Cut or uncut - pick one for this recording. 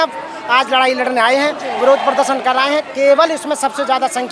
uncut